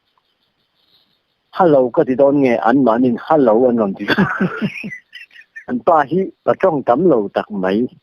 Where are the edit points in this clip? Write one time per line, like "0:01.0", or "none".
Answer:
0:05.7